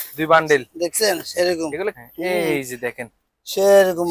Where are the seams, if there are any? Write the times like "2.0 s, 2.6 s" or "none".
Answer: 2.0 s